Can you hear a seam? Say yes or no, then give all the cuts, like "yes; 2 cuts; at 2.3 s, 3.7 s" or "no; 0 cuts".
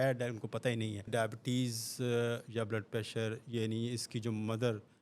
yes; 1 cut; at 1.1 s